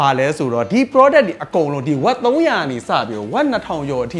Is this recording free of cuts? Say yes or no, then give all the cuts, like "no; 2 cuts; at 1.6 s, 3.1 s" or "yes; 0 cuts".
yes; 0 cuts